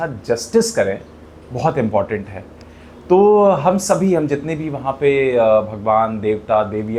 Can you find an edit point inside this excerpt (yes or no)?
no